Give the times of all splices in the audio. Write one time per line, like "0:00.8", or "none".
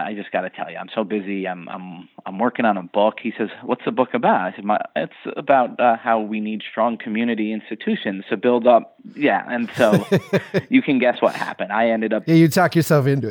none